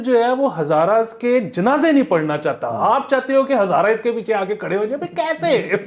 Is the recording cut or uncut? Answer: uncut